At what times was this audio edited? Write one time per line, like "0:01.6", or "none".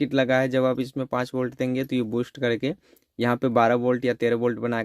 none